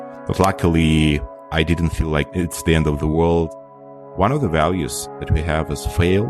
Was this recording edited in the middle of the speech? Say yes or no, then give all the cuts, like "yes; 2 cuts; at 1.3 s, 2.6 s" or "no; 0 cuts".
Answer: yes; 1 cut; at 3.6 s